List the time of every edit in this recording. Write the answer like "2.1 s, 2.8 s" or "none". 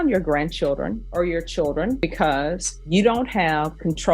1.0 s, 2.4 s